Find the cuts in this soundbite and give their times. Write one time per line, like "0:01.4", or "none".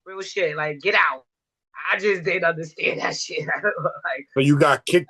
none